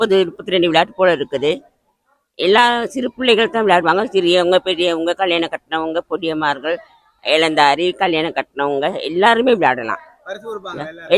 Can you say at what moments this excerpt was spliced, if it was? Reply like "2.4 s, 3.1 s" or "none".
none